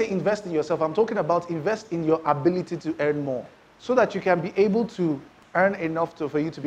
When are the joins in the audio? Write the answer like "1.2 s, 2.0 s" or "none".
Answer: none